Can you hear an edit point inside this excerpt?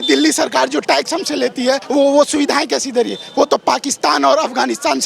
yes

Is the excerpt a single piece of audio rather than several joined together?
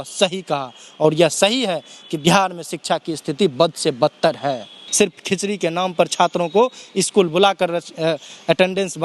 no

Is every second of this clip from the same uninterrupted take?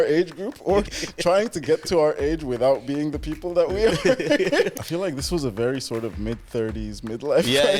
no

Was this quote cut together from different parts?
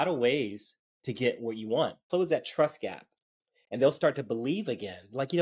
yes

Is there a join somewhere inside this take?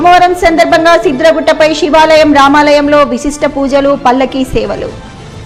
no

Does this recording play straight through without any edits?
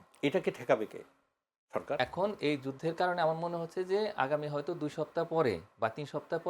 no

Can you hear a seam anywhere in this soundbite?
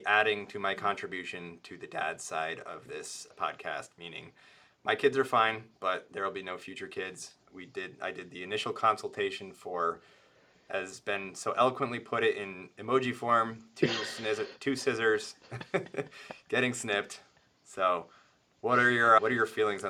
no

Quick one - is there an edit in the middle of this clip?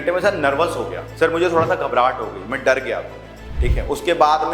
yes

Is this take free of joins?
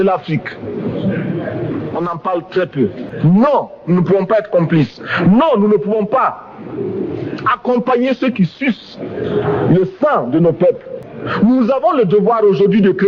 no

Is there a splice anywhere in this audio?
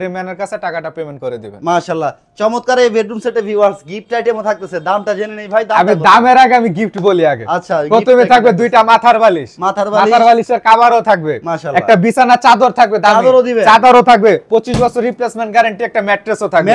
no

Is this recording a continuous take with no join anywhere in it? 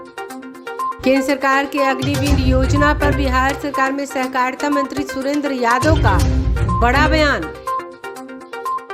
yes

